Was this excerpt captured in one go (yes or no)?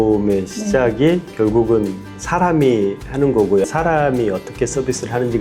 yes